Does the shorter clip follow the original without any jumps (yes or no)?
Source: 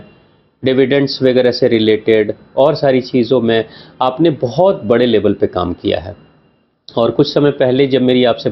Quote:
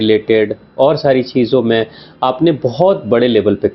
yes